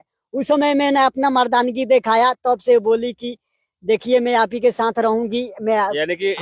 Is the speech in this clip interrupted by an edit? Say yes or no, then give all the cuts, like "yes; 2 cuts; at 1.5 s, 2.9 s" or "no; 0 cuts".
no; 0 cuts